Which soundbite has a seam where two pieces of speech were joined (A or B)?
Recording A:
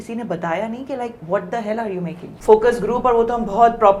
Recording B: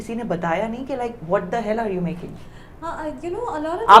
A